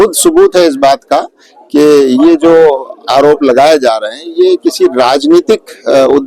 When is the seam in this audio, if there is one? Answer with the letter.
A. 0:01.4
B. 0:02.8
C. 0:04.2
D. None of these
D